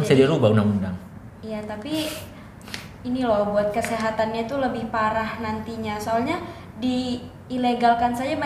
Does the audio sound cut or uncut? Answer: uncut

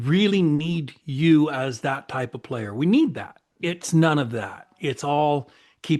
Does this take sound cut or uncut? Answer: cut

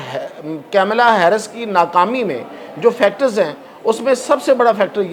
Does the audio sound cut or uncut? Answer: uncut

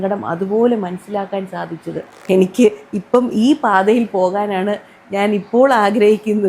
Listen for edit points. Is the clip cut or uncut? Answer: cut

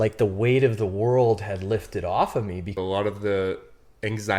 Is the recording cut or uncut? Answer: cut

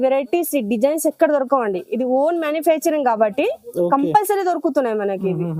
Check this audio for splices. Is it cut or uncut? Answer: uncut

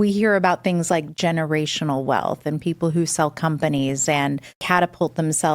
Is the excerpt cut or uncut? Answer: cut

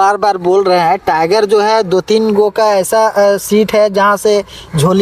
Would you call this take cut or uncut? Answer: uncut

